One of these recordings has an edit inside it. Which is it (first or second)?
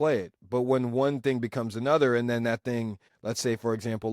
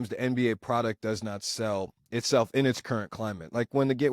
first